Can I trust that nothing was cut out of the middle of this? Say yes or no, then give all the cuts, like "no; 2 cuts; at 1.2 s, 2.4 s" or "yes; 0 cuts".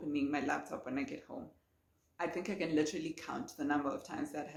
yes; 0 cuts